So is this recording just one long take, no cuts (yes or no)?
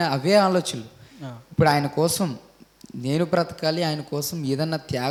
yes